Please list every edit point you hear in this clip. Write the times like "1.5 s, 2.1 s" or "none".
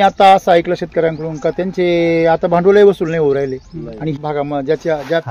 4.2 s